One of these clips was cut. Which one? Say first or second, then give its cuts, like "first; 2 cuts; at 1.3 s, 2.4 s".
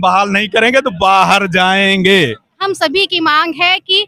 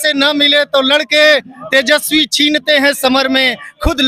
first; 1 cut; at 2.6 s